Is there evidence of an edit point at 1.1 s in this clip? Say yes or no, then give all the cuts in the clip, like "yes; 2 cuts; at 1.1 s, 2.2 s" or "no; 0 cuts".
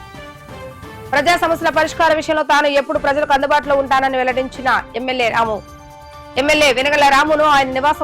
yes; 1 cut; at 1.1 s